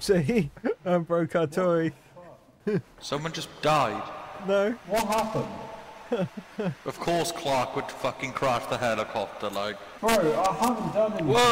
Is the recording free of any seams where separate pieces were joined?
yes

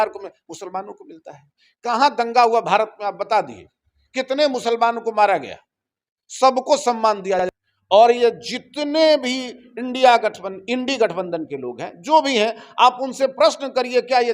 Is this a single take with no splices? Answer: no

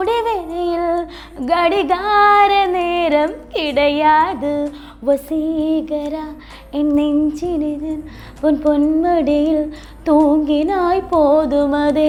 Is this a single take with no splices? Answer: yes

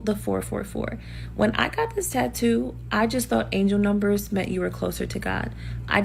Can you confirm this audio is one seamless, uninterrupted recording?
yes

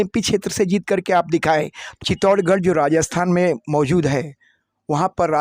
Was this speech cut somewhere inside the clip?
yes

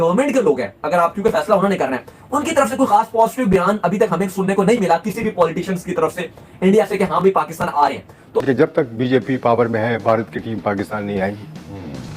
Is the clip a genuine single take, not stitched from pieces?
no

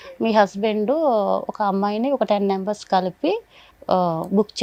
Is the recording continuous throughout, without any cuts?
yes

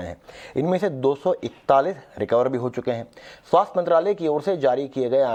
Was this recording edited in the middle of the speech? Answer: no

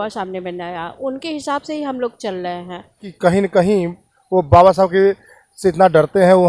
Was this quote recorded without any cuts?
no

